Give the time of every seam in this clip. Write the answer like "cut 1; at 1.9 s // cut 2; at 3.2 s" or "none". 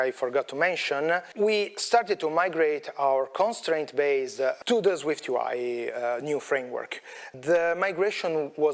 cut 1; at 1.3 s // cut 2; at 4.6 s // cut 3; at 7.2 s

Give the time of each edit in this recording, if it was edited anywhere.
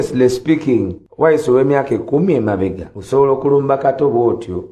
cut 1; at 1.0 s // cut 2; at 2.9 s

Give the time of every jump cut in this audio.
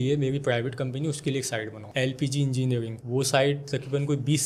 none

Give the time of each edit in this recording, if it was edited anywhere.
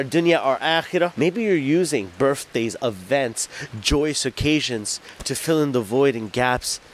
cut 1; at 1.1 s

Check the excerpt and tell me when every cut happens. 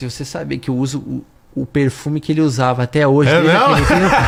none

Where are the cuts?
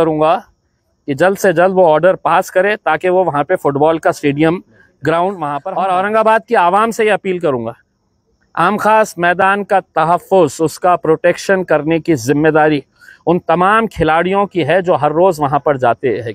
cut 1; at 5.5 s

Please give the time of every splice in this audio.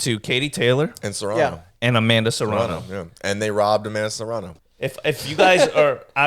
cut 1; at 4.5 s

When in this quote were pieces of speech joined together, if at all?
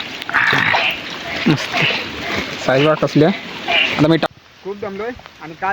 cut 1; at 4.3 s

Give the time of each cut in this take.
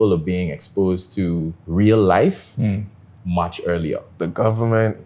cut 1; at 1.6 s // cut 2; at 4.1 s

